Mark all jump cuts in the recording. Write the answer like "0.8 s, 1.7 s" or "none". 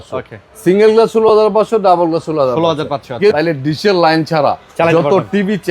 3.3 s